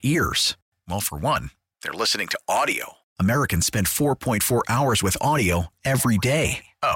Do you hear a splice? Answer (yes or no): no